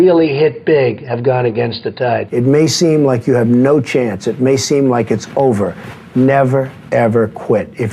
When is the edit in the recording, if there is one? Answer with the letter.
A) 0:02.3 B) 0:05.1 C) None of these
A